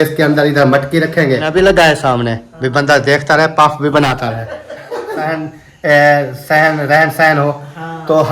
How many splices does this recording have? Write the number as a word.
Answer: two